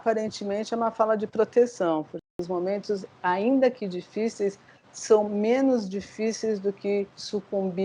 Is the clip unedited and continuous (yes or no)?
no